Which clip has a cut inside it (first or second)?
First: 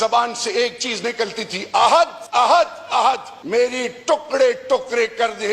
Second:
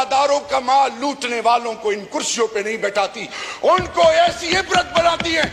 first